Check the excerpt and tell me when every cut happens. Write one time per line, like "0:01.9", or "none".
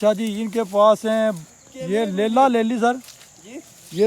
none